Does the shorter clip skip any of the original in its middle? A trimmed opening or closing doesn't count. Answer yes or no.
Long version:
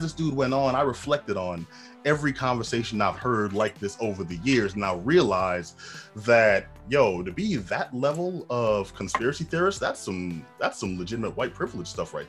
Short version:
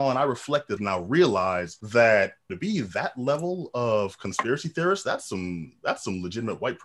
yes